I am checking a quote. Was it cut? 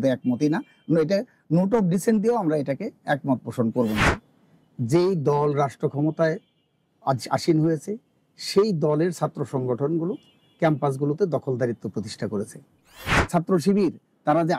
yes; 2 cuts; at 4.1 s, 13.3 s

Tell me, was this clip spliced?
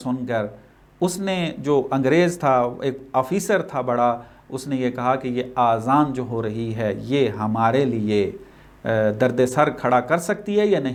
no; 0 cuts

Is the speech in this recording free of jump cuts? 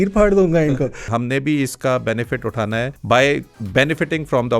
no; 3 cuts; at 1.1 s, 3.0 s, 3.6 s

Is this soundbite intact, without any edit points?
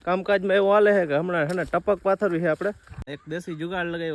no; 1 cut; at 3.0 s

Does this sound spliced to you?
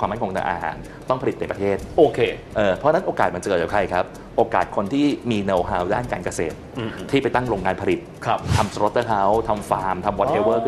no; 0 cuts

